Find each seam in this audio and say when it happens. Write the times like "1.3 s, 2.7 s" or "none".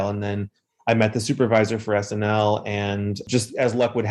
3.2 s